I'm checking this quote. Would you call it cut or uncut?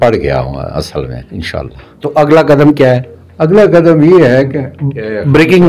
uncut